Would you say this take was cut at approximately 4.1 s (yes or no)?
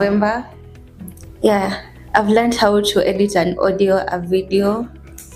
yes